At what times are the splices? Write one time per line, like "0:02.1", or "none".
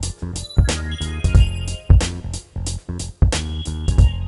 0:01.3